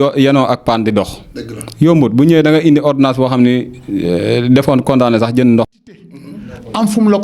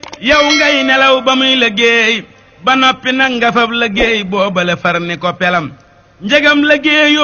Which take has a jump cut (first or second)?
first